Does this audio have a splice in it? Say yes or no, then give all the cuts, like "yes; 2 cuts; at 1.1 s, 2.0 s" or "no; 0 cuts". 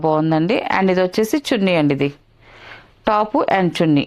no; 0 cuts